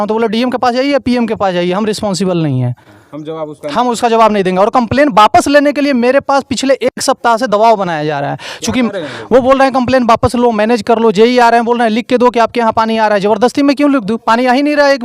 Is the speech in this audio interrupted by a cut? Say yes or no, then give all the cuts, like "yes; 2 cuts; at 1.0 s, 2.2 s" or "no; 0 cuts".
no; 0 cuts